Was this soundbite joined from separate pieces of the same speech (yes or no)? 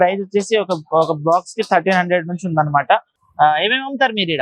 yes